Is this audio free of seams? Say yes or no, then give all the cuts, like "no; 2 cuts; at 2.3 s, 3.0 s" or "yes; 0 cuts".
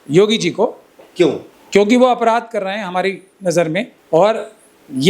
no; 2 cuts; at 1.5 s, 4.0 s